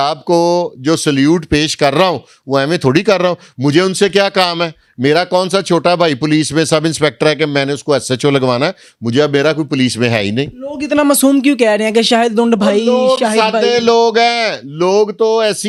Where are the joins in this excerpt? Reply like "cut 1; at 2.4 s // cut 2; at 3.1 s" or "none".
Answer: none